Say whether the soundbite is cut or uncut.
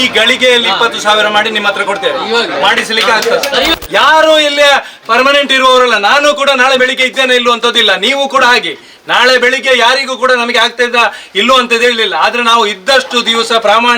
cut